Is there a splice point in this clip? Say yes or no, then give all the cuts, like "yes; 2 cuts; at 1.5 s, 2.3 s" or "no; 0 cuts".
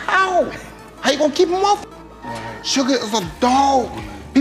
no; 0 cuts